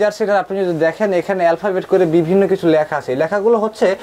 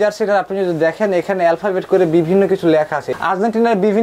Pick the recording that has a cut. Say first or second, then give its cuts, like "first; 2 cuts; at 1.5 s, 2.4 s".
second; 1 cut; at 3.1 s